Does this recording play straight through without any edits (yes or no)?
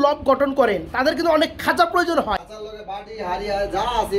no